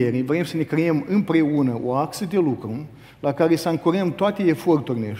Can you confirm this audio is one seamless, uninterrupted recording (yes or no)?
yes